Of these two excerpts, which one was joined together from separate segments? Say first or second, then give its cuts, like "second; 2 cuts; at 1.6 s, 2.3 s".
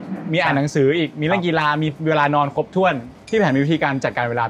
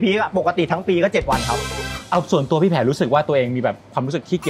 second; 1 cut; at 1.9 s